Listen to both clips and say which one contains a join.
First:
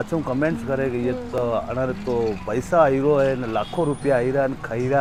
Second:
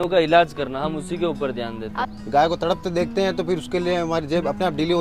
second; 1 cut; at 2.1 s

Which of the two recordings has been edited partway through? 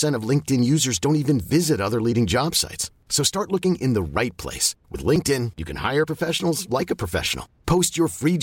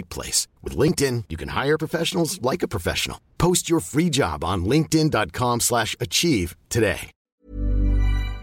second; 1 cut; at 7.4 s

